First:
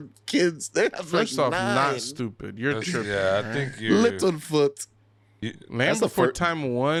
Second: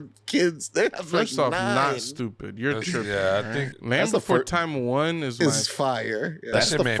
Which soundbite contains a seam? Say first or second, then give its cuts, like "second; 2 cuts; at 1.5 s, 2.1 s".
second; 2 cuts; at 3.7 s, 5.4 s